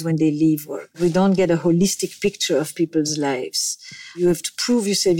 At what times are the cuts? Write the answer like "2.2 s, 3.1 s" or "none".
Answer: 1.0 s, 4.2 s